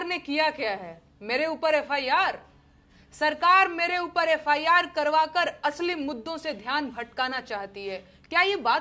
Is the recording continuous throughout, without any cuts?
yes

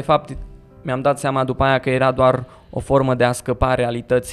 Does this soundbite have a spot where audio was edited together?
no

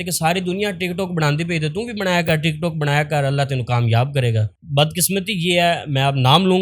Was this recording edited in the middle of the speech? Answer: yes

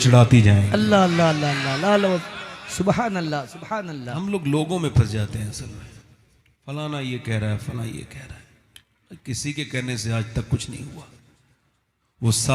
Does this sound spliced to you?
no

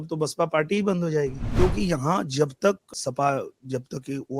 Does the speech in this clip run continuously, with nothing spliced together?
no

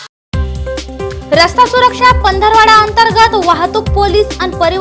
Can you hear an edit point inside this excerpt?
yes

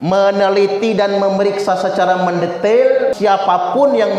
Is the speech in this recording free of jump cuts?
no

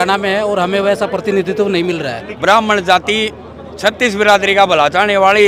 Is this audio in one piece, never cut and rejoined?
no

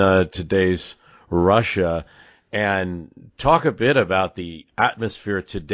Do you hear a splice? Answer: no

